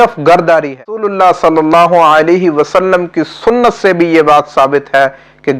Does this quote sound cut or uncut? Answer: cut